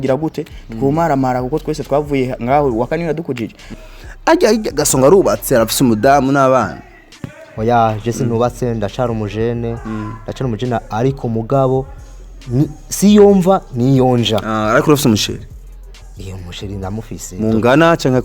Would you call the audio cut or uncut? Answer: cut